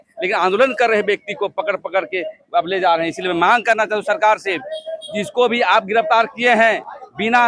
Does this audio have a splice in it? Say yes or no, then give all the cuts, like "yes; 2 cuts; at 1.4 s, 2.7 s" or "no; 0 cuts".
no; 0 cuts